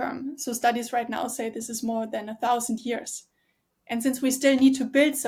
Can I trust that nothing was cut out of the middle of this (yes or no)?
yes